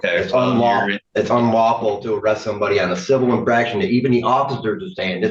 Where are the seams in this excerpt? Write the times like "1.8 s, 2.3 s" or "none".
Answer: 1.0 s